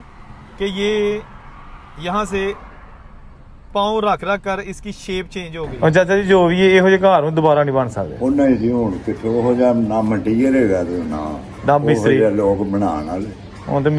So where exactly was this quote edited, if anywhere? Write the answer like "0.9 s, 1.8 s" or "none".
5.6 s